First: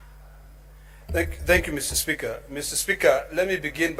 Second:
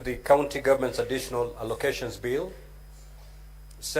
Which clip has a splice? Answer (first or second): second